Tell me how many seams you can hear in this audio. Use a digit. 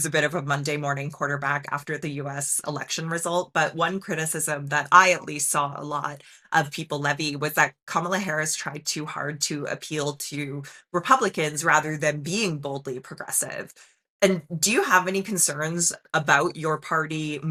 0